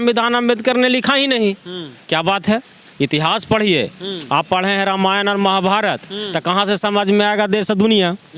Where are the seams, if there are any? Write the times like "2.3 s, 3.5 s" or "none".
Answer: none